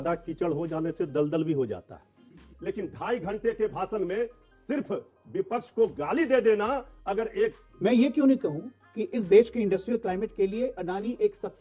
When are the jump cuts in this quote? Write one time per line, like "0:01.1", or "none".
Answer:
0:02.5
0:07.6